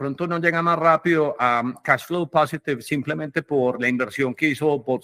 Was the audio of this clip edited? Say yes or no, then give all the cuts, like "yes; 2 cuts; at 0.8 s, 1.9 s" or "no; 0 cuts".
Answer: no; 0 cuts